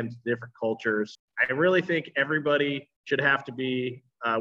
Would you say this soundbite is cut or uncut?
cut